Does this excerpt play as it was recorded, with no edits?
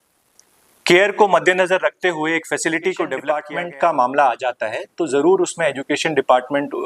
no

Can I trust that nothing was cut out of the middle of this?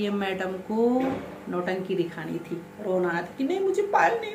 yes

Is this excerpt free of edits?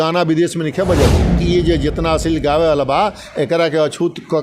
no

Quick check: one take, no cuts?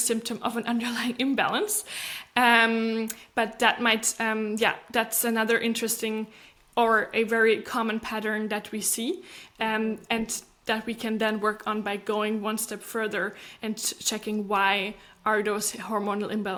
yes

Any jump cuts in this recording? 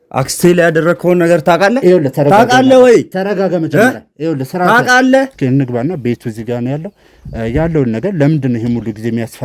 yes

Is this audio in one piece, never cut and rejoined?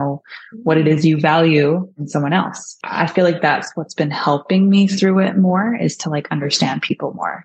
no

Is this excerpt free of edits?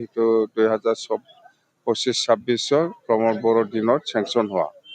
yes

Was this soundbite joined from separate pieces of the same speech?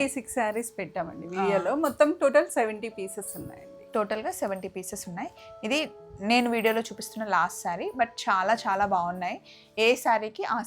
no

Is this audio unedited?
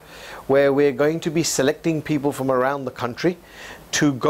yes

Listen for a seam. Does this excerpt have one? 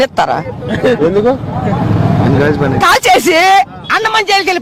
no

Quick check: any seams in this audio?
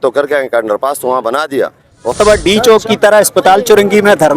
yes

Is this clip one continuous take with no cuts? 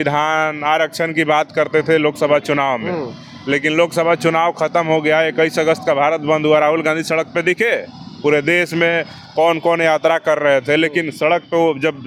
yes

